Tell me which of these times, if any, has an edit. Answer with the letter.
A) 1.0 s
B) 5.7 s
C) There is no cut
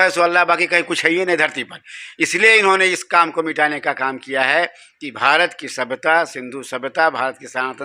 C